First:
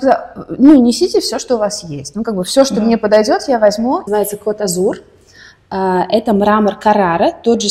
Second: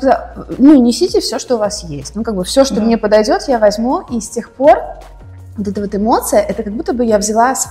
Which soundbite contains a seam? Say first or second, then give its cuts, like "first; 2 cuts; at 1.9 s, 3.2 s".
first; 1 cut; at 4.1 s